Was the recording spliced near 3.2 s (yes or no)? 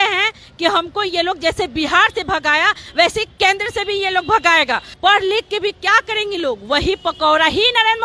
no